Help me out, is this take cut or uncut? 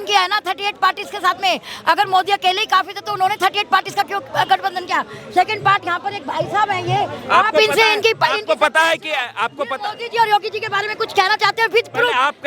uncut